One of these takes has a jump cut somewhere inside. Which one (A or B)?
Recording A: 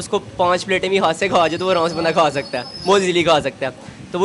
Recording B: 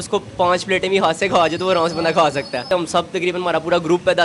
B